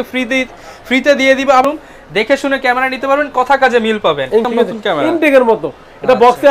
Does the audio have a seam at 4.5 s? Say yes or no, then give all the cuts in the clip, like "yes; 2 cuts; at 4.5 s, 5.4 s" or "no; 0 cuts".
yes; 2 cuts; at 1.6 s, 4.5 s